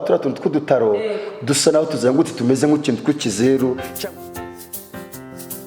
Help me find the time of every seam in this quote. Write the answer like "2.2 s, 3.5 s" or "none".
3.9 s